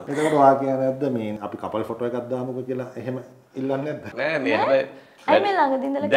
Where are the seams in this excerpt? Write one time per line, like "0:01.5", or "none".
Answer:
0:01.4
0:04.1